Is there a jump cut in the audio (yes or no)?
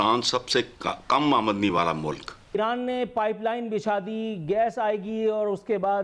yes